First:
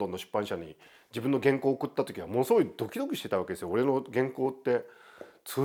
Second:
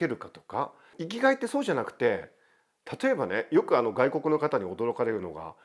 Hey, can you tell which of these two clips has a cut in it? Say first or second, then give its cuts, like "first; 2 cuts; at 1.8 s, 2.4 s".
second; 1 cut; at 1.0 s